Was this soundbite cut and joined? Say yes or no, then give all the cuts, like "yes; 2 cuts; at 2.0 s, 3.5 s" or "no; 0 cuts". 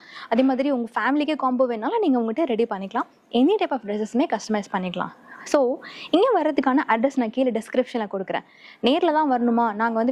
no; 0 cuts